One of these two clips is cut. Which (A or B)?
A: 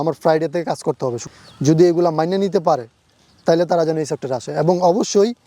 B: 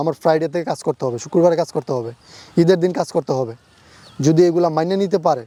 A